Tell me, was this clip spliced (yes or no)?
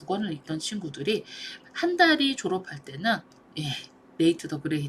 no